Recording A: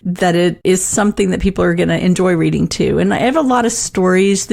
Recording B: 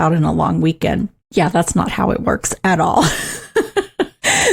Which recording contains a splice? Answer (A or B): B